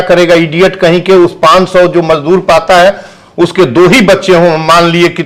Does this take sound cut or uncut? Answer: uncut